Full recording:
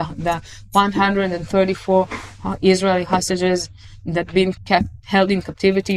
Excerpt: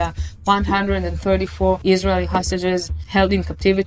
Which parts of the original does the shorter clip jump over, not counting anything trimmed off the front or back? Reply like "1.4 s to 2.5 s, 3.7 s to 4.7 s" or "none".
2.1 s to 2.6 s, 3.8 s to 5.0 s

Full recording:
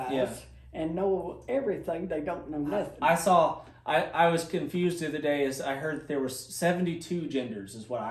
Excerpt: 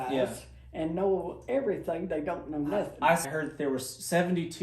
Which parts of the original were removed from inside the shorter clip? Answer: 3.2 s to 5.7 s

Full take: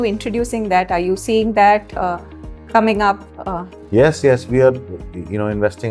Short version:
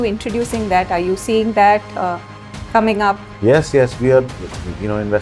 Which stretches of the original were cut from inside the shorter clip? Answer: 3.3 s to 3.8 s

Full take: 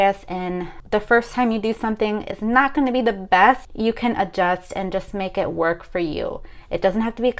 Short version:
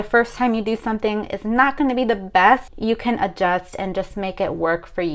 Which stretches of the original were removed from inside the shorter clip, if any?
none

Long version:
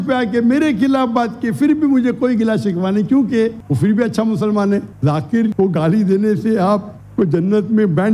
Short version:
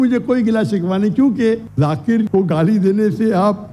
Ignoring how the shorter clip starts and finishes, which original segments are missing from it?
3.6 s to 4.9 s

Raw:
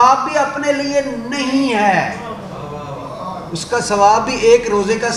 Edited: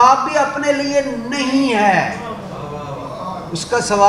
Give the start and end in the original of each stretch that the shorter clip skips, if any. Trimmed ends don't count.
none

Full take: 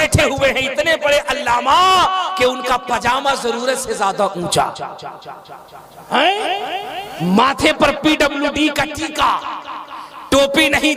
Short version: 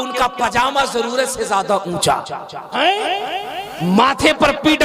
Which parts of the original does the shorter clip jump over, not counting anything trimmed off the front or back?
5.1 s to 6.0 s

